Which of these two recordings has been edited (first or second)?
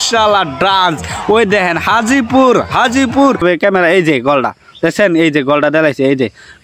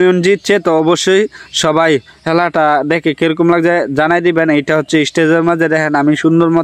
first